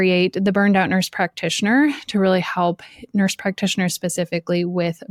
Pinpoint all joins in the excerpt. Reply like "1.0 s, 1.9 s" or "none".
none